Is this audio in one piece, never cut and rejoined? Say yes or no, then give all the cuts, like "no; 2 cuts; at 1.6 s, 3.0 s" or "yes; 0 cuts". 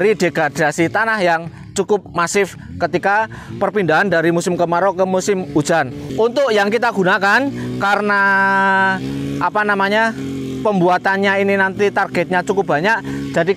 no; 1 cut; at 6.0 s